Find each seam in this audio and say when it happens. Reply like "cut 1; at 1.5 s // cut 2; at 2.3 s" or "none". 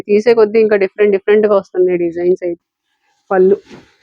cut 1; at 2.6 s